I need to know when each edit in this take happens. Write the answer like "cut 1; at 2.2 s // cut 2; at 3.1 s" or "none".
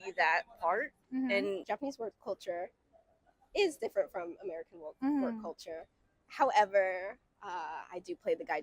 cut 1; at 1.6 s